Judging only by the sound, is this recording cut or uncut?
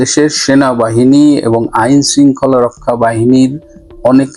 uncut